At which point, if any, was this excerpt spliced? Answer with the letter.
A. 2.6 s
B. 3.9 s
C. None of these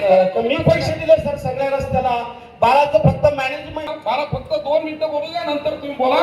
B